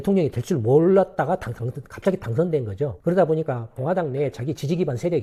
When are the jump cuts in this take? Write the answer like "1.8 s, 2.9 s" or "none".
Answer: none